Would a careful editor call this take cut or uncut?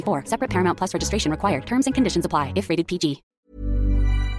cut